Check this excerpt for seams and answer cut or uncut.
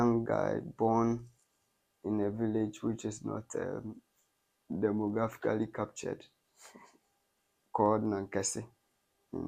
uncut